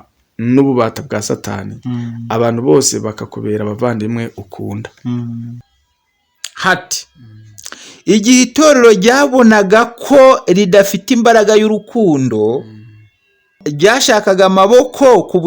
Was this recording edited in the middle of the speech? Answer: yes; 2 cuts; at 5.6 s, 13.6 s

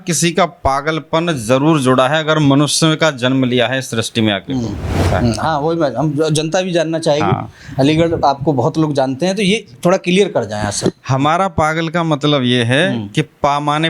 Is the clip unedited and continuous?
no; 1 cut; at 5.1 s

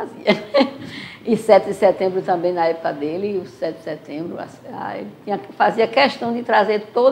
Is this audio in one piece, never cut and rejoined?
yes; 0 cuts

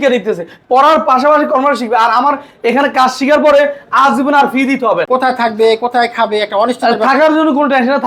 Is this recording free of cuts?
no; 1 cut; at 5.0 s

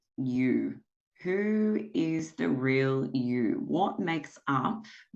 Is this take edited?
no; 0 cuts

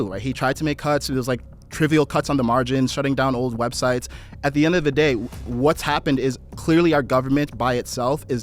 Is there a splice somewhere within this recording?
no; 0 cuts

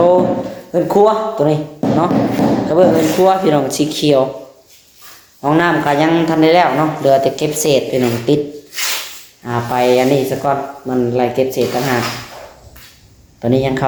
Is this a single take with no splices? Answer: yes; 0 cuts

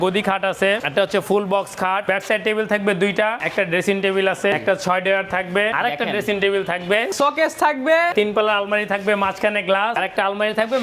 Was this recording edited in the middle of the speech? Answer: yes; 8 cuts; at 0.8 s, 2.0 s, 3.4 s, 4.6 s, 5.7 s, 7.1 s, 8.1 s, 10.0 s

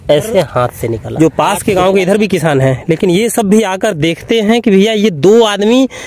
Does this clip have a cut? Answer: yes; 1 cut; at 1.1 s

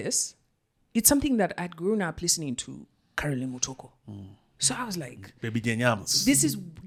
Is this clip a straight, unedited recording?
yes; 0 cuts

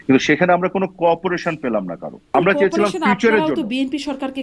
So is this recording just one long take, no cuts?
no; 1 cut; at 2.2 s

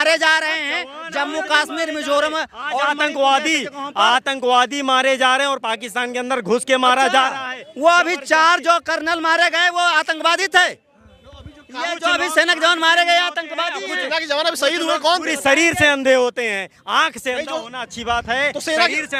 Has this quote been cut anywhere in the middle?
no; 0 cuts

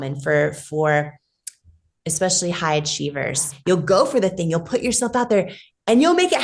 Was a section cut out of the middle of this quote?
yes; 1 cut; at 3.5 s

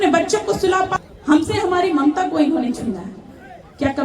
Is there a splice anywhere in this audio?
yes; 1 cut; at 1.0 s

